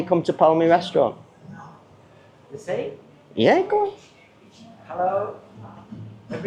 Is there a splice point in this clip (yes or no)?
no